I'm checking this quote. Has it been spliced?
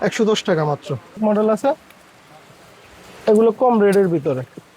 yes; 1 cut; at 1.2 s

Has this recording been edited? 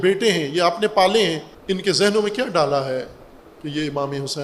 yes; 1 cut; at 1.5 s

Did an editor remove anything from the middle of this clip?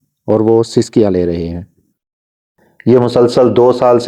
yes; 1 cut; at 2.2 s

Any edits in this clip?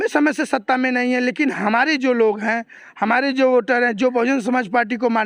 no; 0 cuts

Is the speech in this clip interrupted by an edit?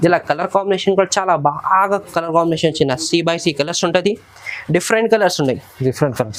no; 0 cuts

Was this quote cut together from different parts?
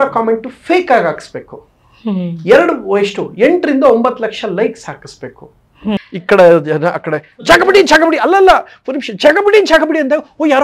yes; 1 cut; at 6.0 s

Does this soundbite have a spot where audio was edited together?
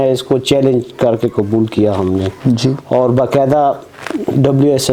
no; 0 cuts

